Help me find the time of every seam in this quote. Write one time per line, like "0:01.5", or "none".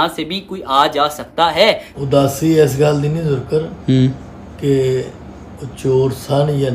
0:01.9